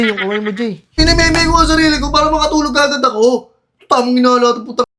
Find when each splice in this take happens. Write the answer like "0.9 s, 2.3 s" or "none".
1.0 s